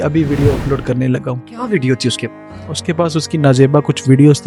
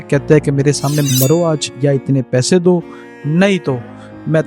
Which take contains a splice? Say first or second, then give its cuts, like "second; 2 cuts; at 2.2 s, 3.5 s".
second; 1 cut; at 1.1 s